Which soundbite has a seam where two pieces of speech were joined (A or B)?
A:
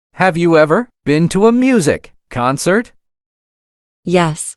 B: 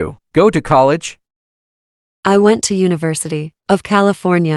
A